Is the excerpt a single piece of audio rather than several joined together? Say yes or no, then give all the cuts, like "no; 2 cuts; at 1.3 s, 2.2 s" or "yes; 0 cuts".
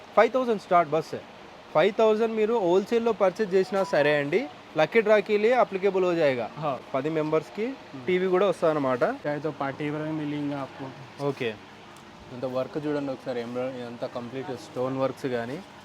no; 2 cuts; at 6.9 s, 9.2 s